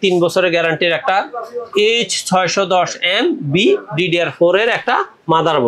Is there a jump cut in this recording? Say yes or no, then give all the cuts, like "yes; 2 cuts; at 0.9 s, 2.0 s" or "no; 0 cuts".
no; 0 cuts